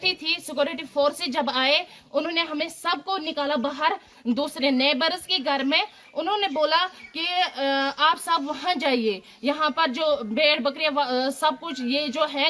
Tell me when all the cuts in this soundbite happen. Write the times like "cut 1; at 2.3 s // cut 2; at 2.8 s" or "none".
none

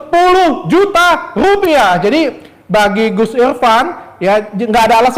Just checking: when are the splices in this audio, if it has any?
none

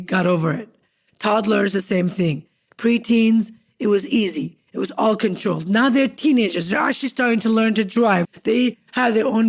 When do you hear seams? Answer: cut 1; at 8.2 s

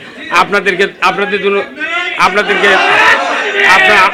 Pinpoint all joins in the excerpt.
none

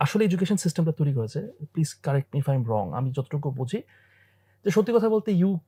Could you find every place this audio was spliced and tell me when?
none

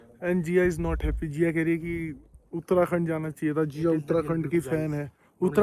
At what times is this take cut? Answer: none

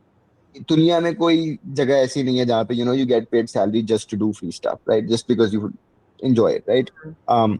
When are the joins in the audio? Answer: none

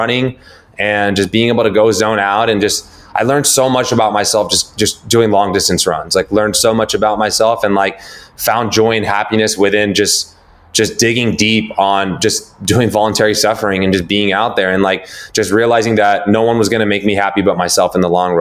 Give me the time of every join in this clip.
none

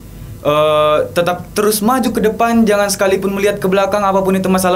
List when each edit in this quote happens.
none

